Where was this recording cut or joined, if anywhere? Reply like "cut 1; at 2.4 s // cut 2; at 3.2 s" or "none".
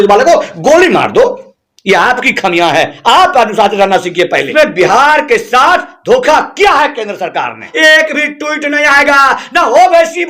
cut 1; at 4.5 s // cut 2; at 7.7 s